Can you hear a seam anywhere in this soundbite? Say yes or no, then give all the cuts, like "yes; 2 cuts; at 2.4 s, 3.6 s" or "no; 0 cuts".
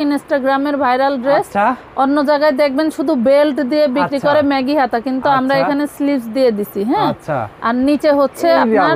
no; 0 cuts